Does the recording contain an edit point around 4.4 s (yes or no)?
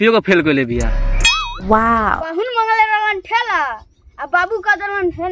no